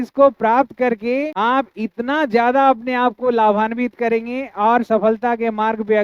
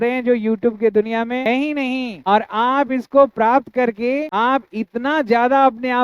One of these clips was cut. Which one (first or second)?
second